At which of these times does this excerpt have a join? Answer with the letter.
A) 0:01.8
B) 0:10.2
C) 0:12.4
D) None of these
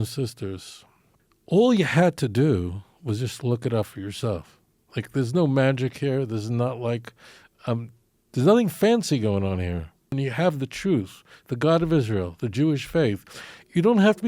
B